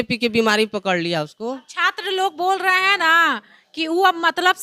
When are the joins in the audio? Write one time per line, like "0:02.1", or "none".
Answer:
none

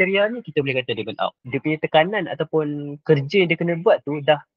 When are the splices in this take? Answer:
0:01.4

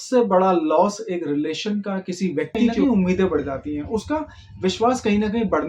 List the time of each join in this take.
0:02.8

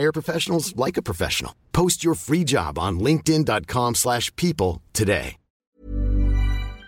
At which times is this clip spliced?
0:05.5

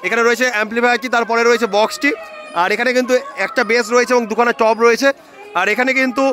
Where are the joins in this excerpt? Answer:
none

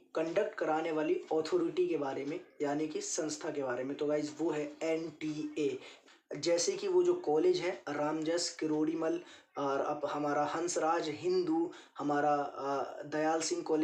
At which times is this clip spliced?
0:06.1

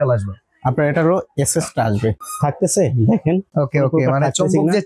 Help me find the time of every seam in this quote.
0:02.2
0:03.5

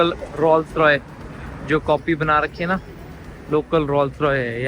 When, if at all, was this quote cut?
none

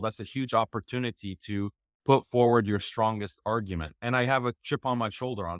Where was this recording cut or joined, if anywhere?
0:04.0

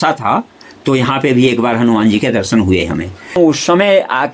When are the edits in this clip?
0:03.4

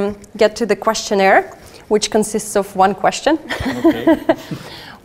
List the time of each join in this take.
none

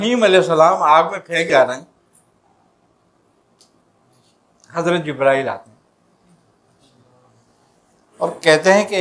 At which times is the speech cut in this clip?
0:01.5

